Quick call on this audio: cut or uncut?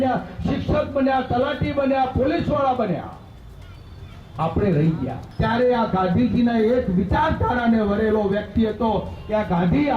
cut